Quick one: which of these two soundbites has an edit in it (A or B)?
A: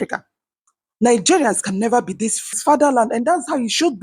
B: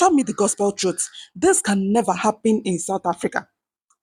A